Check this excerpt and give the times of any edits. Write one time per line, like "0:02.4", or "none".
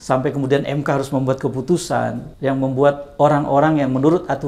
0:02.3